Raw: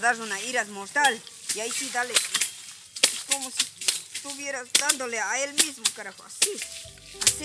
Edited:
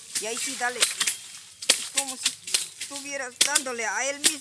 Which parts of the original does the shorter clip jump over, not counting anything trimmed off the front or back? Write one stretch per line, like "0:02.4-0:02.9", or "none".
none